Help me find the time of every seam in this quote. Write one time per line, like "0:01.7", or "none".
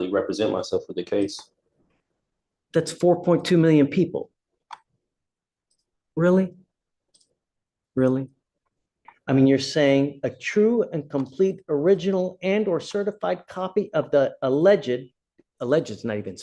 0:09.0